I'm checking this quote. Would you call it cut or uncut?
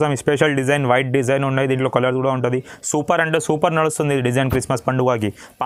uncut